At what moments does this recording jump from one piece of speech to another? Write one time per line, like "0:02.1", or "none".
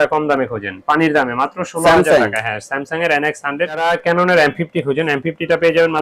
0:03.8